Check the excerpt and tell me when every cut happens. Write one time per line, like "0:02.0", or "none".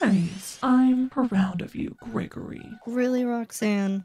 none